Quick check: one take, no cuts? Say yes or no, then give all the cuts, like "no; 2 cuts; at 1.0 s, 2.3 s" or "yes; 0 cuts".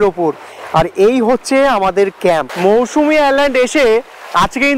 no; 1 cut; at 2.5 s